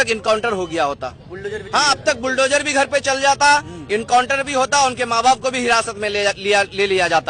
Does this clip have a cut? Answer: no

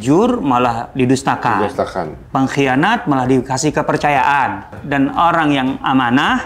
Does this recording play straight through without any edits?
no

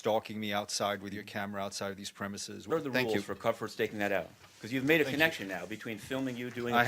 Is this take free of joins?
no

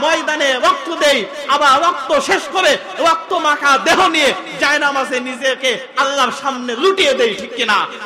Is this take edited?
no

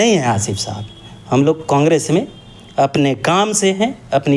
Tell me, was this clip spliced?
no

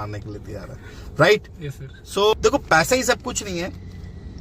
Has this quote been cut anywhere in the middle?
yes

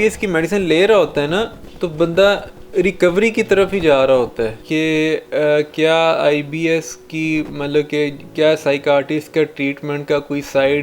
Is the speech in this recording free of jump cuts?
no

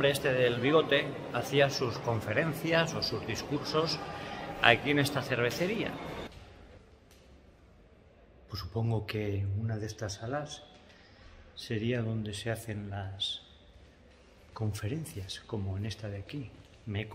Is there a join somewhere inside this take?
yes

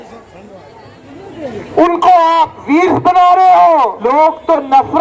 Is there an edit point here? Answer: yes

